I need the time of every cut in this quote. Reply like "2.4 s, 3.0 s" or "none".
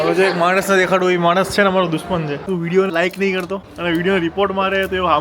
2.5 s, 3.6 s